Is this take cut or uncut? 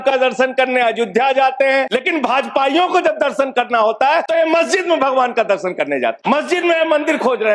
cut